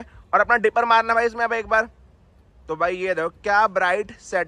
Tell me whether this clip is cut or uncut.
uncut